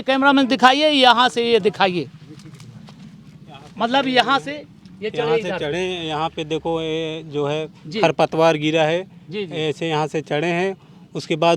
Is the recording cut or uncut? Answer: uncut